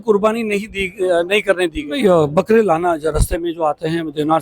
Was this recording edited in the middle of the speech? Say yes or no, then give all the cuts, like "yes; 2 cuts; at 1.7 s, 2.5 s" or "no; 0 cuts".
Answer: yes; 1 cut; at 2.0 s